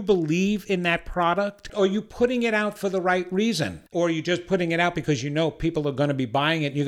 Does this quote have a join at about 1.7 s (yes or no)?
yes